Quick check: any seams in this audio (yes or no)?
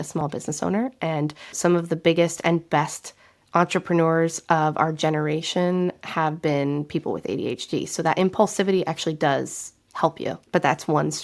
yes